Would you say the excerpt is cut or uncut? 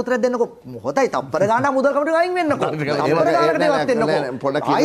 uncut